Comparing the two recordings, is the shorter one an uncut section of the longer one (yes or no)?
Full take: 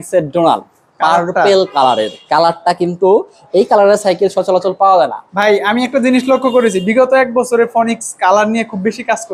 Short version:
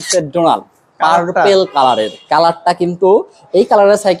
yes